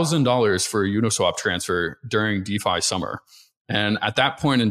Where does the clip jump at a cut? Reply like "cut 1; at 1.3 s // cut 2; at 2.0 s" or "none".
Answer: none